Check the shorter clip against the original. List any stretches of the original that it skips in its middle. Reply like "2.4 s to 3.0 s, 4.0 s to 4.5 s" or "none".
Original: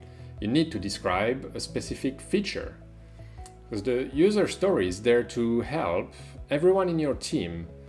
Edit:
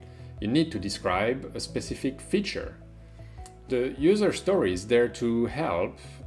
3.7 s to 3.8 s